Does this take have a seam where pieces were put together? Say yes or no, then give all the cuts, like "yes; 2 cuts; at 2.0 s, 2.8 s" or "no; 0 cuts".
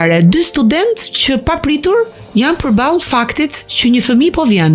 no; 0 cuts